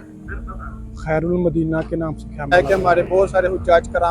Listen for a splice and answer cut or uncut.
cut